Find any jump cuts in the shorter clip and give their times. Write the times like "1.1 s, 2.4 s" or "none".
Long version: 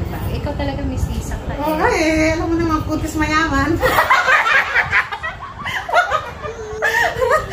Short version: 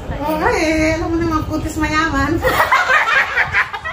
none